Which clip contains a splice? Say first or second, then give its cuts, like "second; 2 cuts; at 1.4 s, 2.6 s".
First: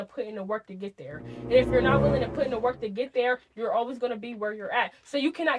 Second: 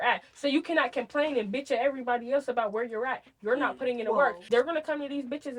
second; 1 cut; at 4.4 s